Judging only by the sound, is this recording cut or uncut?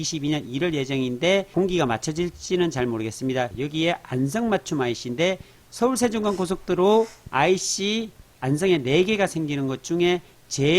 cut